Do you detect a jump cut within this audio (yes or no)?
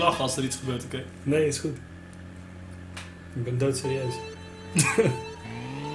no